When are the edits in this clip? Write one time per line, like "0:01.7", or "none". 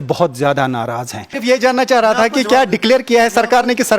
0:01.3